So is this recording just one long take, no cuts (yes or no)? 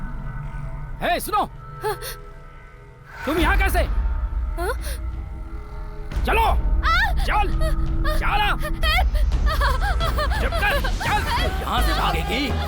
no